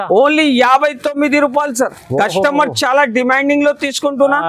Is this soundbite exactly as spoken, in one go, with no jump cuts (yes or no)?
yes